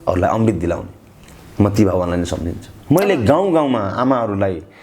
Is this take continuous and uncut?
no; 1 cut; at 2.7 s

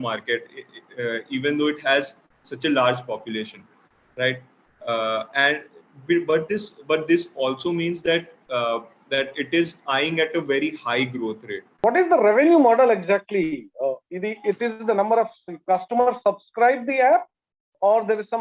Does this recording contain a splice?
yes; 1 cut; at 11.8 s

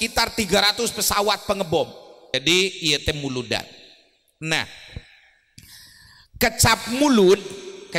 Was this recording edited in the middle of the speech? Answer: yes; 1 cut; at 2.3 s

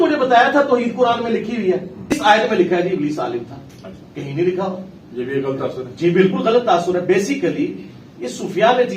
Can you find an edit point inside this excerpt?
yes; 1 cut; at 2.1 s

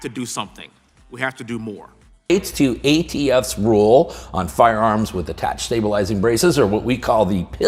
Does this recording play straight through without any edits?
yes; 0 cuts

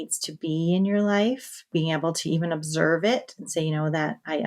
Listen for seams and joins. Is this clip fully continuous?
no; 1 cut; at 1.7 s

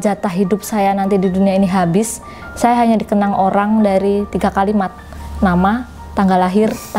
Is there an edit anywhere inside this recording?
no; 0 cuts

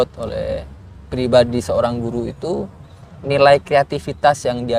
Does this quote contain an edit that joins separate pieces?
no; 0 cuts

